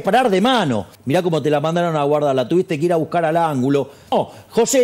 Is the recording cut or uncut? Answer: cut